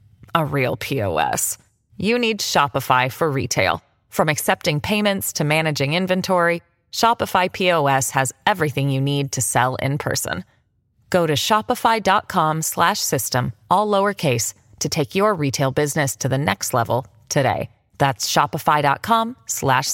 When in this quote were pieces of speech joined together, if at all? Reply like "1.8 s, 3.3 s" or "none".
none